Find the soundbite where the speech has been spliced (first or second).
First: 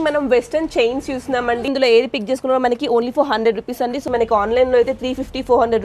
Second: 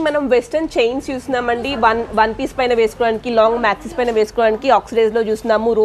first